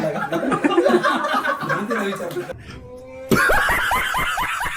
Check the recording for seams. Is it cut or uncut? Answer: cut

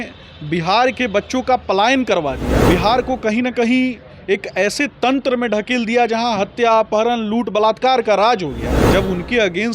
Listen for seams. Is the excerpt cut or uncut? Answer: cut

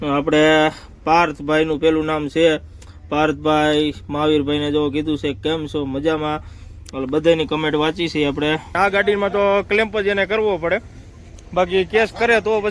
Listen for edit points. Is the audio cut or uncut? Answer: cut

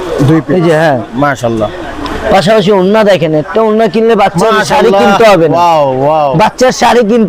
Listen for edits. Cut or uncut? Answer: uncut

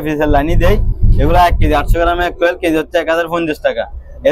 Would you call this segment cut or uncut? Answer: uncut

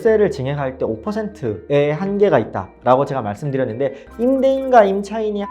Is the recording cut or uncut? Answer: cut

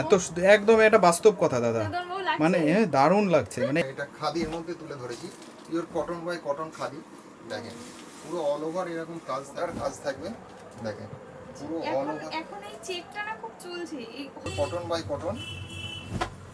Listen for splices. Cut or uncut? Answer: cut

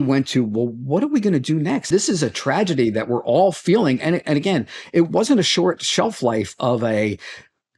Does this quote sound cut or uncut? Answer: cut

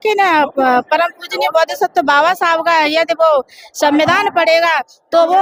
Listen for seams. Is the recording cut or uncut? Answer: uncut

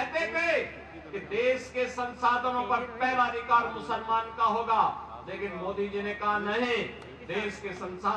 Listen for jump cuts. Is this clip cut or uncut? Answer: uncut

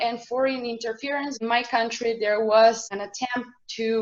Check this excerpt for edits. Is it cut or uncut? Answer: cut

